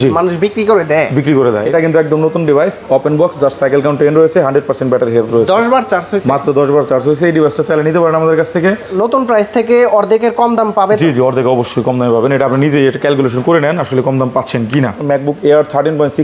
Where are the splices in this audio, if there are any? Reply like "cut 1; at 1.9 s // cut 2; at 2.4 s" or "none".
cut 1; at 1.6 s // cut 2; at 8.9 s // cut 3; at 15.0 s

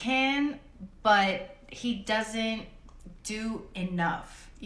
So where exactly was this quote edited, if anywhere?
none

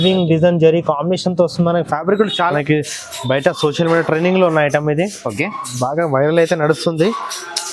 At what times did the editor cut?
cut 1; at 2.5 s

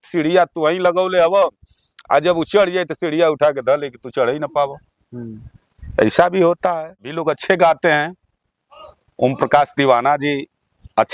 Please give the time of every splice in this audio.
cut 1; at 7.2 s

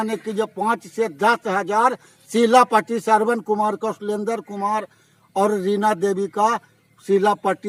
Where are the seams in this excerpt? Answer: none

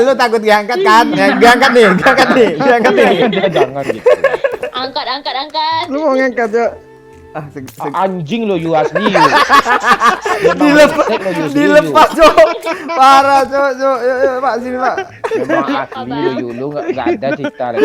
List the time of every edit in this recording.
none

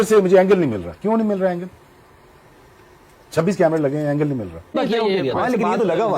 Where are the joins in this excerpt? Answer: cut 1; at 4.7 s

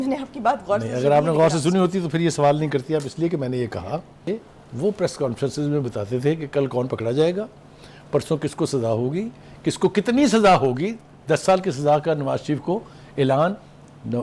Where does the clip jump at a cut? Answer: cut 1; at 4.1 s

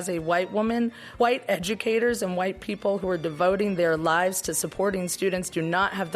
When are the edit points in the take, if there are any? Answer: cut 1; at 1.0 s

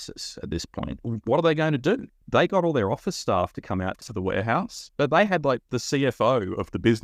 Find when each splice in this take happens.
cut 1; at 1.0 s // cut 2; at 2.1 s // cut 3; at 4.1 s

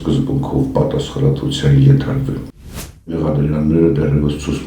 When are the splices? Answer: cut 1; at 2.7 s

